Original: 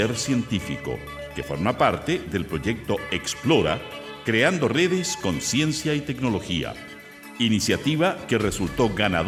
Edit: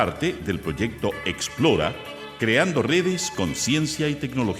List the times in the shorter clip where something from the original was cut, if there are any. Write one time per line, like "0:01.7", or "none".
none